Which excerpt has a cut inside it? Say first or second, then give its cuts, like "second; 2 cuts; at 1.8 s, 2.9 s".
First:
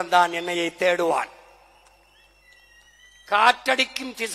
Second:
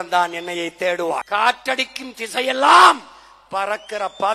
second; 1 cut; at 1.3 s